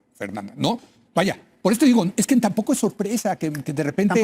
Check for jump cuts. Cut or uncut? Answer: uncut